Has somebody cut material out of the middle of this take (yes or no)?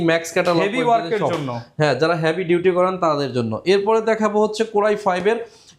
no